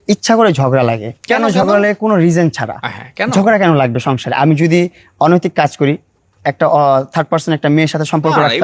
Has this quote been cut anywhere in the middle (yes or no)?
yes